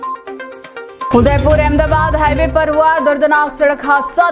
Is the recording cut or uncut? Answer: uncut